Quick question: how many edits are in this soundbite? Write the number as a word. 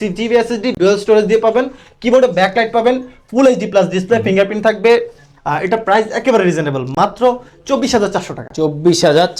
zero